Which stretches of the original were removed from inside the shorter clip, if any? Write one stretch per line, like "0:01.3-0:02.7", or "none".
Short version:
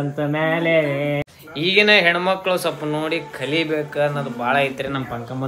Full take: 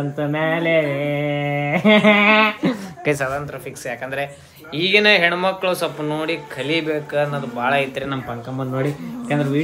0:01.2-0:04.4